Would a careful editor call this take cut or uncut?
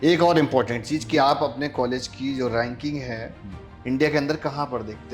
uncut